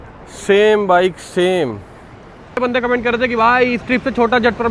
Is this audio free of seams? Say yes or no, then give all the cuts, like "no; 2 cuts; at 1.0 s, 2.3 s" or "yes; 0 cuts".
no; 1 cut; at 2.6 s